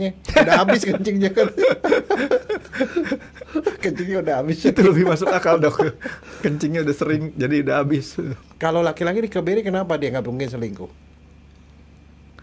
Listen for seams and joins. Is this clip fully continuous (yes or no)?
no